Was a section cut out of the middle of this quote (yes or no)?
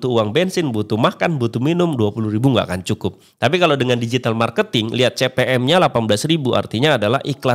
no